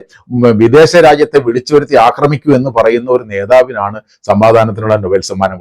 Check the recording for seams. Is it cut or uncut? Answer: uncut